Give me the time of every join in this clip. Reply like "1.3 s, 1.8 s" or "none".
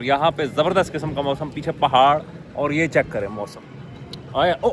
none